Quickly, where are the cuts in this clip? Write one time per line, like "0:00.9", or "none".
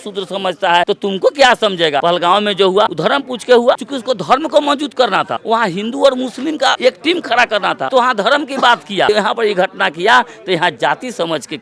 0:00.9
0:02.0
0:02.9
0:03.9
0:05.4
0:06.8
0:07.8
0:09.1